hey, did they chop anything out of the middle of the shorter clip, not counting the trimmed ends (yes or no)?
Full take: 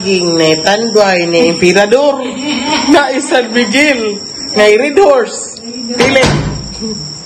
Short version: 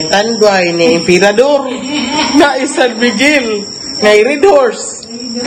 no